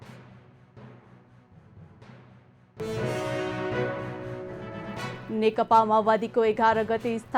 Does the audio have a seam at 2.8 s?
yes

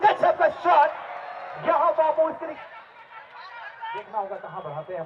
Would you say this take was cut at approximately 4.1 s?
no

